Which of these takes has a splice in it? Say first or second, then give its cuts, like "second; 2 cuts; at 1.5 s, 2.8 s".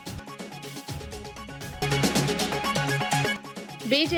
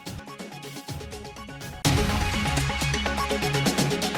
second; 1 cut; at 1.6 s